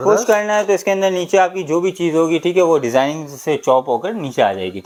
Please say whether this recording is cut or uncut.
uncut